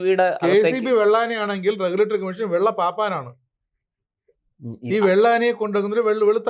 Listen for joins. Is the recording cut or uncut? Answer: uncut